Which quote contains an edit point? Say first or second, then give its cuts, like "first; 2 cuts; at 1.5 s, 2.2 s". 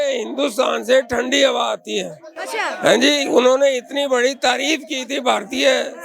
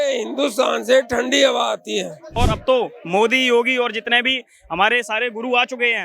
second; 1 cut; at 2.2 s